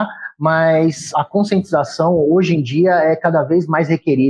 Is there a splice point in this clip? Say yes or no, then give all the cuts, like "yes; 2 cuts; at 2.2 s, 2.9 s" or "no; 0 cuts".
yes; 1 cut; at 1.1 s